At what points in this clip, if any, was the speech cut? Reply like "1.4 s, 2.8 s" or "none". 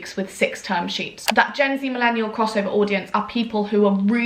1.2 s